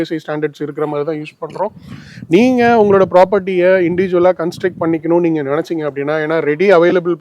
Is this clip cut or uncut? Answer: uncut